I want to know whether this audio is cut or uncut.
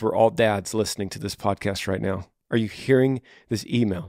cut